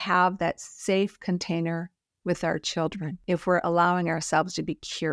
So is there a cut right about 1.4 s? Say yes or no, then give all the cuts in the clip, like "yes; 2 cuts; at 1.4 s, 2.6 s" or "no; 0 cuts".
no; 1 cut; at 3.2 s